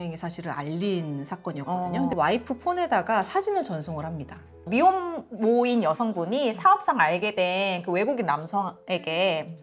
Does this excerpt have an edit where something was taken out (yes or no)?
yes